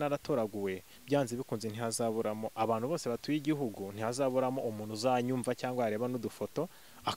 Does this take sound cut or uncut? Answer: uncut